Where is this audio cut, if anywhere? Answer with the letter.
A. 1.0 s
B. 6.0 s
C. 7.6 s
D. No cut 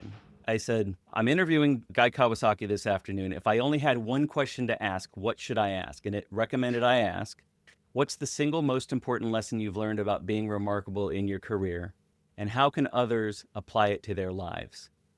A